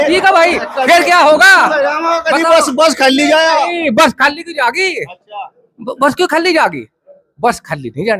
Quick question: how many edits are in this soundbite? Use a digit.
0